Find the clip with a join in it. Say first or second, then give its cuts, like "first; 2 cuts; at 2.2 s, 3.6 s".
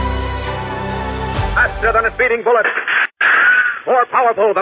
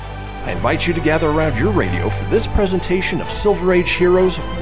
first; 1 cut; at 1.5 s